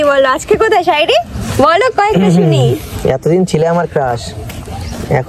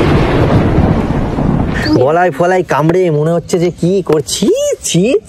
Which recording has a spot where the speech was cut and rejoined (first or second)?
second